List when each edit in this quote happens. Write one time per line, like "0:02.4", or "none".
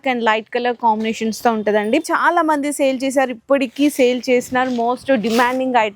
0:02.0